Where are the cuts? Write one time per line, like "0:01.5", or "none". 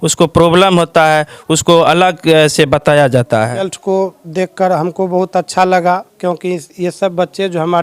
0:03.7